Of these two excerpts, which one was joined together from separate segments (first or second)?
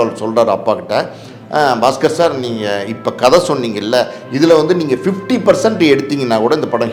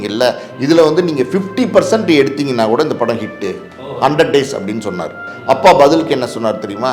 second